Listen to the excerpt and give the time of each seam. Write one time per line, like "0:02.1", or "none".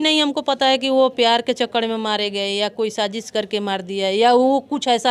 none